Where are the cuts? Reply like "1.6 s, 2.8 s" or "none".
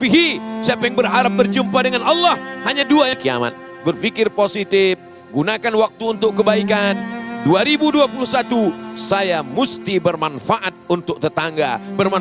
3.2 s